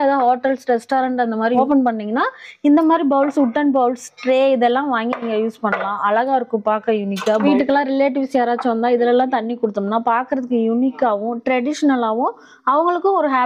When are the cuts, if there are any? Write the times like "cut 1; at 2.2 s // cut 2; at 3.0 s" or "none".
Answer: cut 1; at 1.6 s // cut 2; at 7.4 s

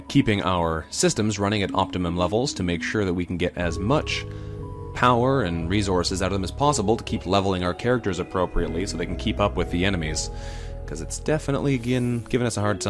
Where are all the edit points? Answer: cut 1; at 7.4 s

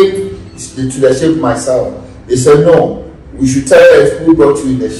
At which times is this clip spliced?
none

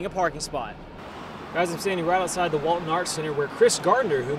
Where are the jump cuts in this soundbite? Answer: cut 1; at 1.2 s

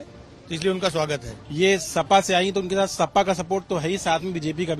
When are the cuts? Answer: cut 1; at 1.4 s

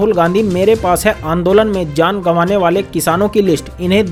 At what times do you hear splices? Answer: none

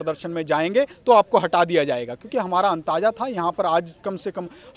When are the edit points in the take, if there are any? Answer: none

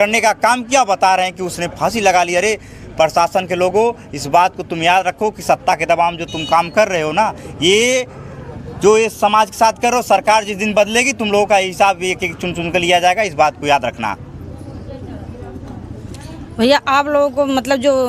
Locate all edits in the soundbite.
none

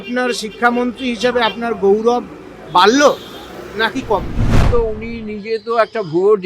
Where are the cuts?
cut 1; at 4.6 s

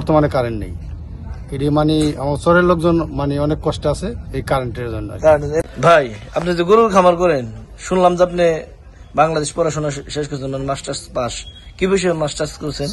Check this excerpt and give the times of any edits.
cut 1; at 5.6 s

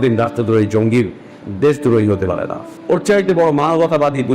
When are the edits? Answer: cut 1; at 2.9 s

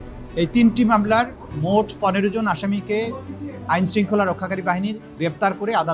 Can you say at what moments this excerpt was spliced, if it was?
none

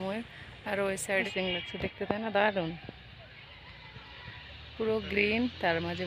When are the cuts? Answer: cut 1; at 1.3 s

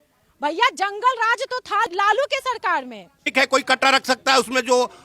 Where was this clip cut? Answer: cut 1; at 1.9 s // cut 2; at 3.2 s

